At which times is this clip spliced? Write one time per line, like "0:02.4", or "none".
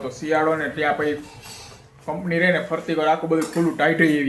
none

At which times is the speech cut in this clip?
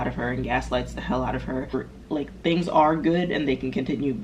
0:01.7

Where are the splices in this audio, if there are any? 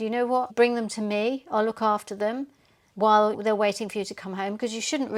none

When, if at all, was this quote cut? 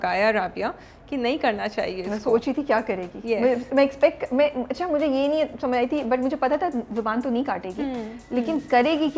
none

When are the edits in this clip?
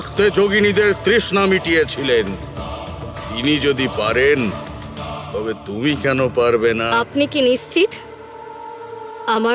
0:06.9

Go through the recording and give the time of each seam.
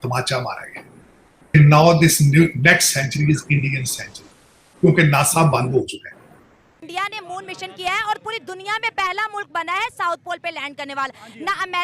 0:01.5
0:06.8

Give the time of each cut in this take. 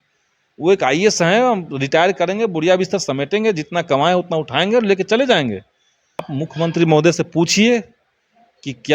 0:06.3

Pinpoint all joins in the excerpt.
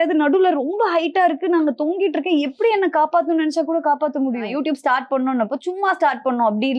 0:04.5

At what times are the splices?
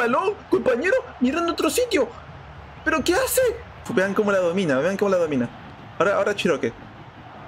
0:03.8

